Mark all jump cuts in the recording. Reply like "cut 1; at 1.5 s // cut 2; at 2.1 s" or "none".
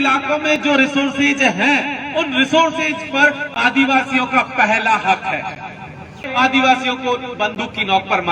cut 1; at 6.2 s